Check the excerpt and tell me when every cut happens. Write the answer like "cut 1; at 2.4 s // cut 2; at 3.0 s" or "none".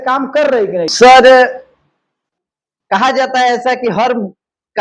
cut 1; at 0.9 s

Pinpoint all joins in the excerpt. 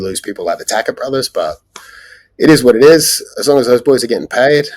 none

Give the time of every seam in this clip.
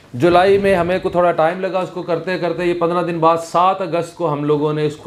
none

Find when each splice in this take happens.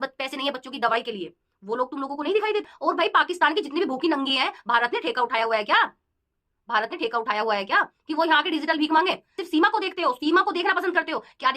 cut 1; at 2.7 s // cut 2; at 9.3 s

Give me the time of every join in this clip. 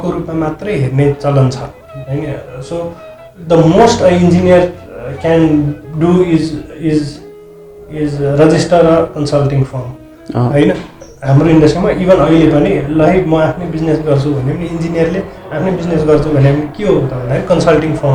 none

